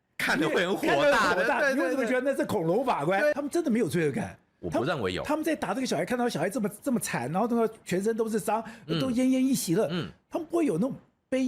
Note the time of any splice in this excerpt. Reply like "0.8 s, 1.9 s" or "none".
3.4 s